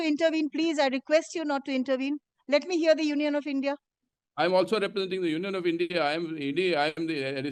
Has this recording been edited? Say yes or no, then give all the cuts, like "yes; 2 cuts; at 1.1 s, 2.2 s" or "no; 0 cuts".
no; 0 cuts